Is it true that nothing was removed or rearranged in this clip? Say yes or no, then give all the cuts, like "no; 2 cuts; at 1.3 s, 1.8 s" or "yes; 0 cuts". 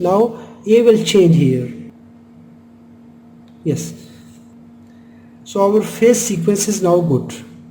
no; 1 cut; at 1.9 s